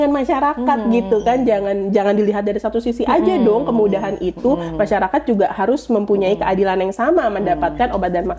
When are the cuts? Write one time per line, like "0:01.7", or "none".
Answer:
none